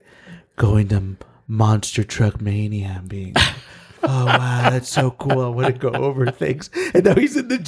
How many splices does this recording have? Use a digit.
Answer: 0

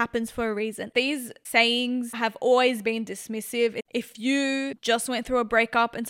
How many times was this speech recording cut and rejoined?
3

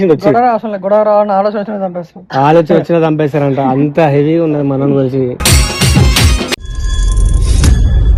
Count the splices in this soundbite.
0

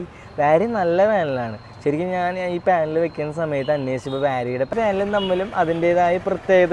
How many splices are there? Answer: 1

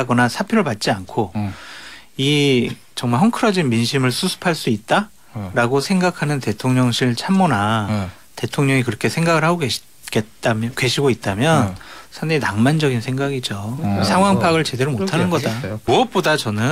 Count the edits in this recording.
1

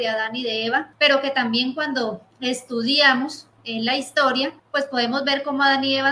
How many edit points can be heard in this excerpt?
2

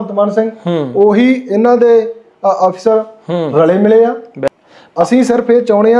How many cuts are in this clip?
1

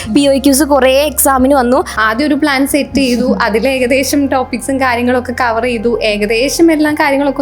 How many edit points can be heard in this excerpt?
1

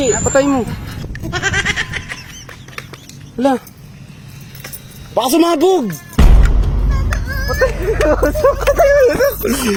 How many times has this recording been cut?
0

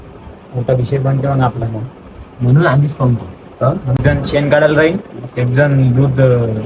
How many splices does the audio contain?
1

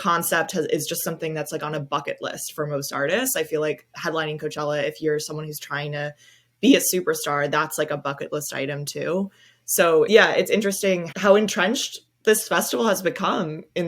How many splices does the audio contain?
1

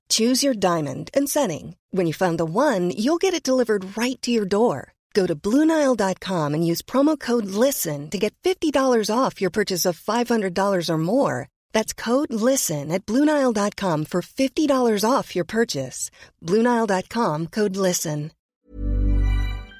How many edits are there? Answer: 1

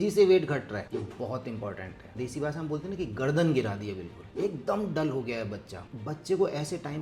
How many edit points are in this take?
2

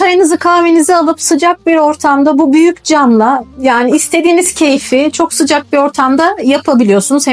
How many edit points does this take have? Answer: 0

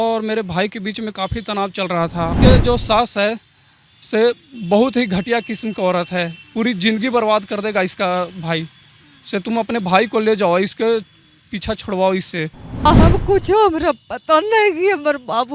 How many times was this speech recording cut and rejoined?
2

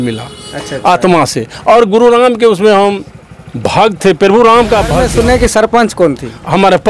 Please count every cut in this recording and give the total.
1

